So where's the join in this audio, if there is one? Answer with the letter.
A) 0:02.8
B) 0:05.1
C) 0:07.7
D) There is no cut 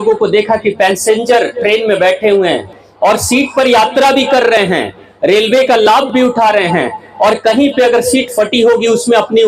A